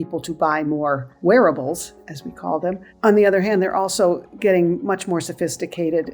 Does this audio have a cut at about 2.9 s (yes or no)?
yes